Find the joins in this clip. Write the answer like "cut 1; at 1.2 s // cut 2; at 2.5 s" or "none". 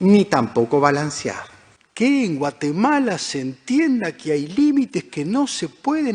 cut 1; at 1.9 s